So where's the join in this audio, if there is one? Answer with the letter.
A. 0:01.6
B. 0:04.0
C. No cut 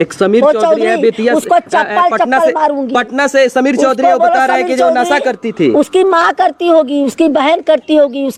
C